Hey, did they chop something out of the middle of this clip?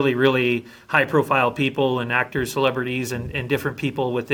no; 0 cuts

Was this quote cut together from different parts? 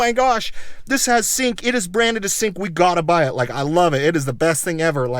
no; 0 cuts

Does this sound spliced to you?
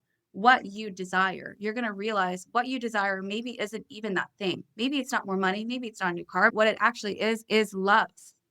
yes; 1 cut; at 6.5 s

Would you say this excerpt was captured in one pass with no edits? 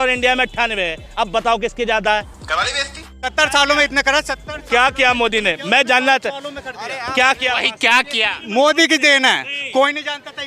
no; 2 cuts; at 2.5 s, 8.4 s

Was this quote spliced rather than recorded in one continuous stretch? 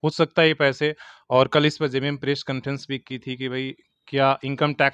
no; 0 cuts

